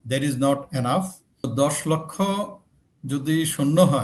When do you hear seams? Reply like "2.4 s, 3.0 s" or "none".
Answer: 1.5 s